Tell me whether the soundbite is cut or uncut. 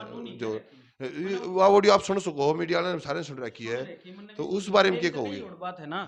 uncut